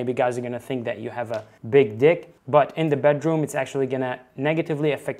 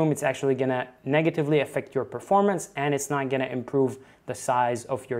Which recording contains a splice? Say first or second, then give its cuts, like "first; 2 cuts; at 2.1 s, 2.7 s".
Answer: first; 1 cut; at 1.5 s